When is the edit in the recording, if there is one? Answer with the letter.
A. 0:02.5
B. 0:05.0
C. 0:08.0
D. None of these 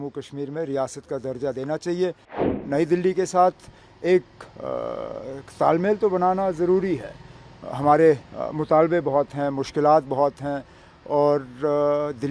A